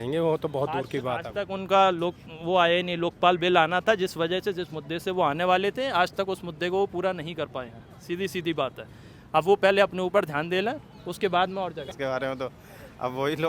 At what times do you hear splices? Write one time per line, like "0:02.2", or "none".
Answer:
0:11.9